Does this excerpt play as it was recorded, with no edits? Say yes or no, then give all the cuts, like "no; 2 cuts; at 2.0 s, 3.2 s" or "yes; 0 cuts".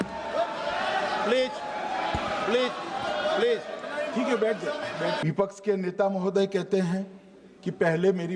no; 1 cut; at 5.2 s